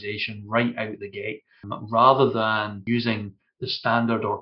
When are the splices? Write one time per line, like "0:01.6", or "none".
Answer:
0:01.7
0:02.8